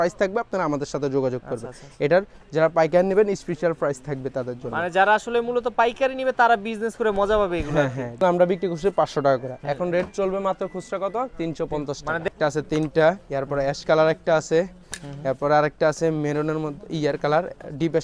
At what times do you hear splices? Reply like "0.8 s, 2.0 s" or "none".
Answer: 2.4 s, 8.2 s, 12.3 s